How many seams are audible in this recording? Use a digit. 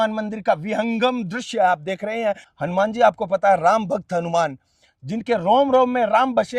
1